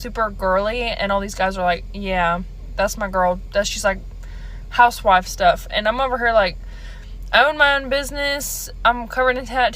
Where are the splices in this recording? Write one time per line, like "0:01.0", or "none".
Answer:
none